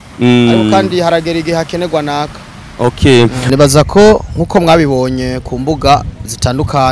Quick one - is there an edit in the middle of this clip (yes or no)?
yes